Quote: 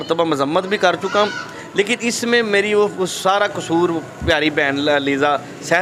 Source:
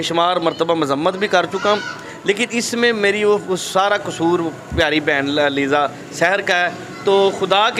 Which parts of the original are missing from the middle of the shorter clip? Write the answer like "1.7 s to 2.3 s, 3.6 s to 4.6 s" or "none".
none